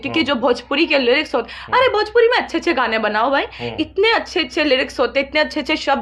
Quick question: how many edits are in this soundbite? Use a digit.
0